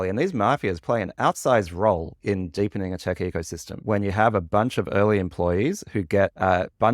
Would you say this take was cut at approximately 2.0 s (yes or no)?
no